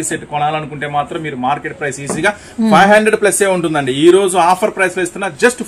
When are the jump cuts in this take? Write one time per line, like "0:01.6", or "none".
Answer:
none